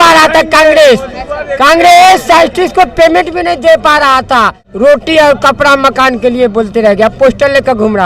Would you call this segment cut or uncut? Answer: cut